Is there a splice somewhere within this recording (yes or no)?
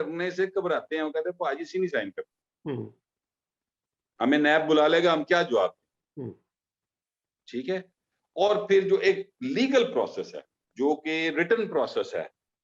no